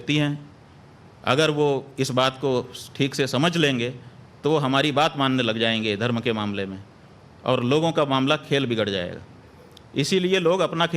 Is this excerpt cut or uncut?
cut